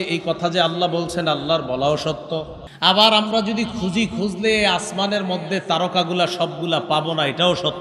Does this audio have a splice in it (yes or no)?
yes